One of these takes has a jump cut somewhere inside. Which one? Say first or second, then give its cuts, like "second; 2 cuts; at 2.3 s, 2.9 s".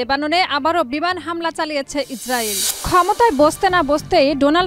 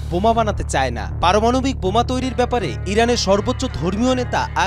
first; 1 cut; at 2.8 s